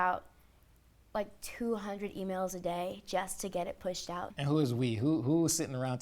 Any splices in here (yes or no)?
yes